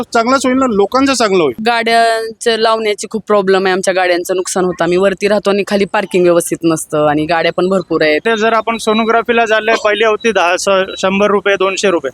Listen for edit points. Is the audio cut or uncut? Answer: cut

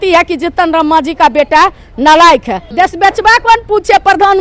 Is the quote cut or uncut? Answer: cut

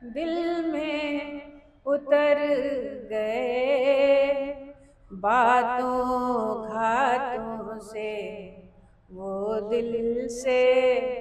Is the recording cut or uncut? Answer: uncut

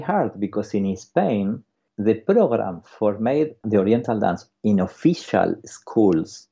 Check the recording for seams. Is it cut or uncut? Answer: cut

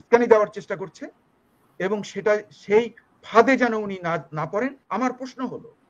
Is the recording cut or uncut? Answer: cut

